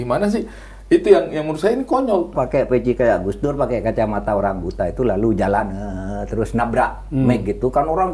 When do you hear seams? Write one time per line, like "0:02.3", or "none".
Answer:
0:02.3